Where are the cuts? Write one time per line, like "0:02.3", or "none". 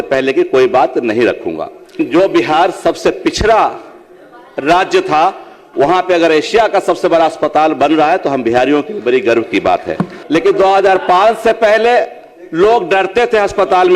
0:02.0
0:10.1